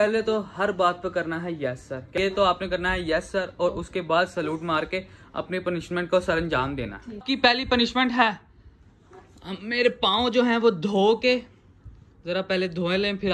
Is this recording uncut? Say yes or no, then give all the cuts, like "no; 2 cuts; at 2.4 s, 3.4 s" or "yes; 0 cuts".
no; 2 cuts; at 2.1 s, 7.2 s